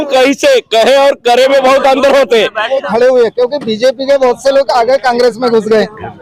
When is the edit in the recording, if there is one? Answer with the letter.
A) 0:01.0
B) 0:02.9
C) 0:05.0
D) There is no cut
B